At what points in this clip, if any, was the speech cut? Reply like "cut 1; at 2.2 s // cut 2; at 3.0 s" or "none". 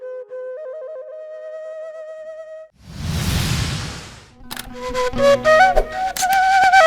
none